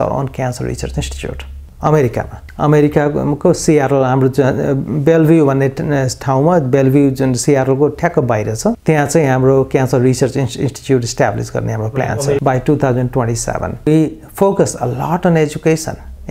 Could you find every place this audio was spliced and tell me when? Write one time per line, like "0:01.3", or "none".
0:08.8
0:12.4
0:13.9